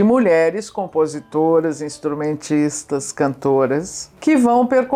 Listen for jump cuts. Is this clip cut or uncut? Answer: uncut